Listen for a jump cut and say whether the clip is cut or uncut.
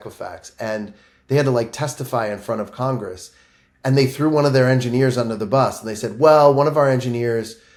uncut